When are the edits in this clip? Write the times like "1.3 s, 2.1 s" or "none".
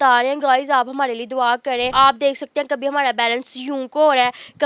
1.9 s